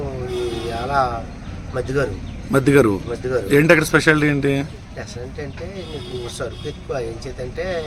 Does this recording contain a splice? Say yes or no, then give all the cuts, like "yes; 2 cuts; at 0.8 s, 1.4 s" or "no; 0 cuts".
no; 0 cuts